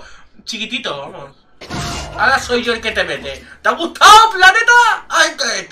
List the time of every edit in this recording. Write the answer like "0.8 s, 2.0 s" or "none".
1.6 s